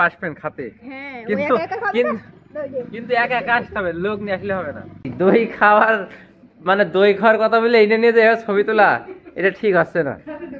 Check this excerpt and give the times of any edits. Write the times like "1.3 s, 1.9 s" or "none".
5.1 s

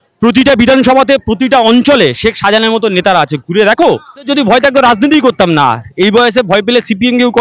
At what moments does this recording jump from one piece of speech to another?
4.3 s

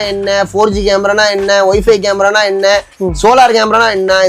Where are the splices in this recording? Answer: none

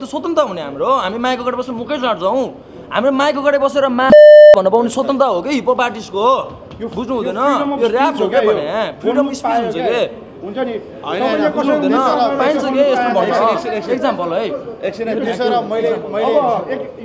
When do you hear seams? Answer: none

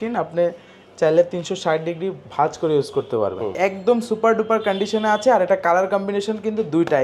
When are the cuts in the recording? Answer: 3.5 s

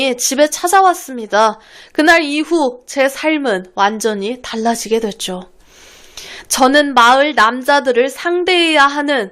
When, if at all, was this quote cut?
none

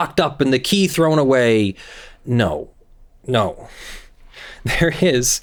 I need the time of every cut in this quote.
none

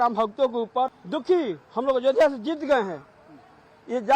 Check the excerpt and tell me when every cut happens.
none

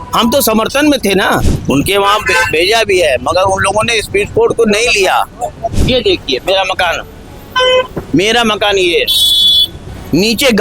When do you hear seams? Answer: 1.5 s, 5.8 s

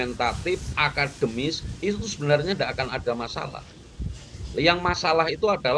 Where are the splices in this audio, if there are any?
none

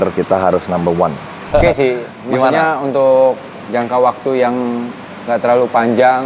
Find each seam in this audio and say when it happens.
1.5 s

